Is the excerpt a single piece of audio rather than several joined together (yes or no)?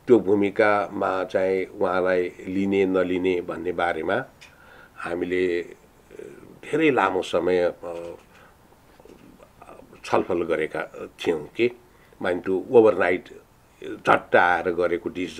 yes